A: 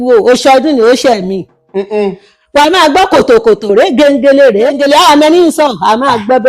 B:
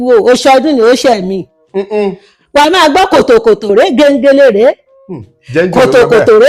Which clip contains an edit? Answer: A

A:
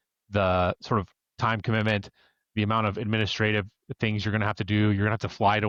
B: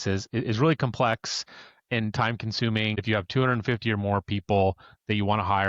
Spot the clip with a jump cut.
B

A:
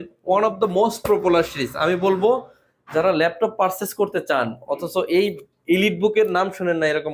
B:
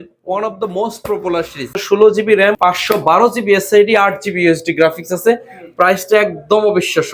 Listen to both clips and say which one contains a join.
B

